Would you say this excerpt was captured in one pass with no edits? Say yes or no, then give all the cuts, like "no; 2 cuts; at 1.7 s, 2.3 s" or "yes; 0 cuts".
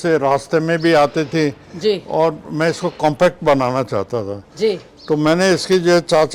yes; 0 cuts